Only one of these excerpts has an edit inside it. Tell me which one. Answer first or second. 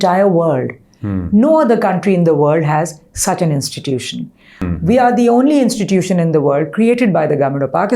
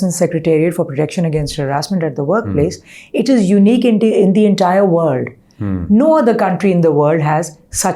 first